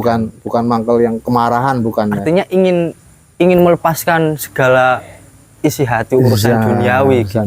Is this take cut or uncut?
uncut